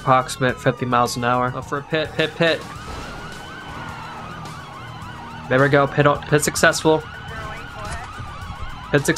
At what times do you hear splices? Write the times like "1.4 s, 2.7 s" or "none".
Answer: 1.7 s